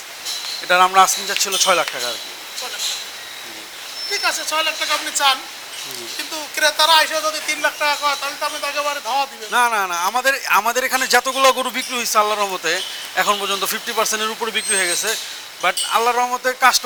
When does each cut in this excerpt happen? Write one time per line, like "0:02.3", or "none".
none